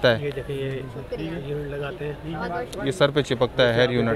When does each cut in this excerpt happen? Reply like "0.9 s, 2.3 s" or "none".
none